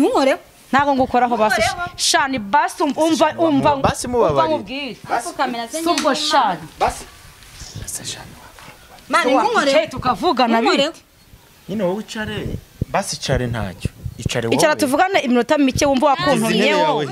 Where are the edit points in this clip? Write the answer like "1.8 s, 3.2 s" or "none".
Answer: none